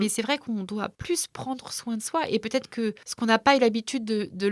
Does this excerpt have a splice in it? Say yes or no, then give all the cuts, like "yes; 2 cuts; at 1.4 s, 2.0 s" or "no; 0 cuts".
yes; 2 cuts; at 1.0 s, 3.1 s